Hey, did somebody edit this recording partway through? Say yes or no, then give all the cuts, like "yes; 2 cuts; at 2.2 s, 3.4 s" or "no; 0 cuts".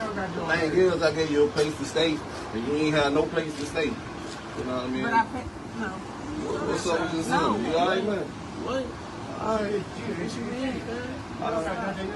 no; 0 cuts